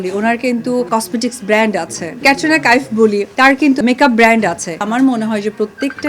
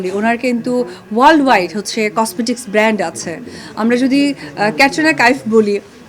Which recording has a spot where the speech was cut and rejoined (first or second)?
first